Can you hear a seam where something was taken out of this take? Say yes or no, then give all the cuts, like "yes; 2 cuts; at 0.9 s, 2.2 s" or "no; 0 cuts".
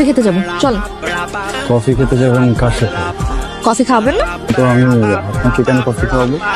no; 0 cuts